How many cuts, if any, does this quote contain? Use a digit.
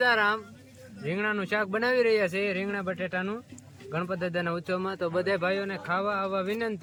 0